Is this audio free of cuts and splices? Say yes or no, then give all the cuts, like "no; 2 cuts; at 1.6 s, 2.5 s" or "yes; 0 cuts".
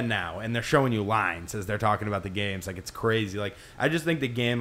yes; 0 cuts